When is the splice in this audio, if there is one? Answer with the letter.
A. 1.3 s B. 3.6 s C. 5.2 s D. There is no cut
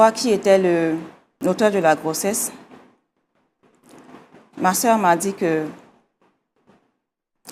A